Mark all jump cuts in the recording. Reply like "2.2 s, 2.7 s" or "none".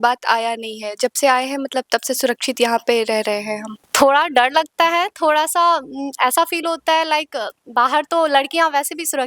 3.9 s